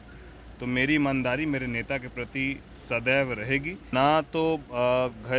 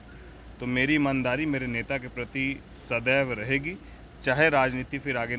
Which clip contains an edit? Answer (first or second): first